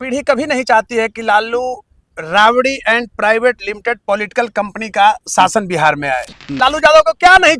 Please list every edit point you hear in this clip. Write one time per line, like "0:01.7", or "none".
0:06.6

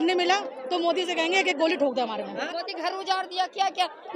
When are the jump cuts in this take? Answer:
0:02.4

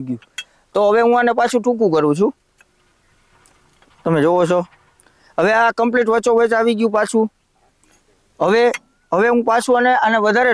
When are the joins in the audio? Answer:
none

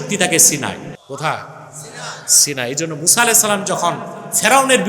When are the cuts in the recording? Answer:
0:01.0

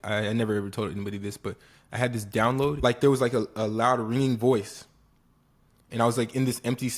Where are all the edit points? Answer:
0:02.8

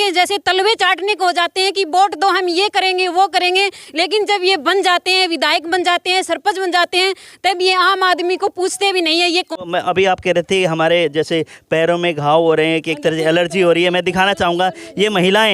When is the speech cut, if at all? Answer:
0:09.5

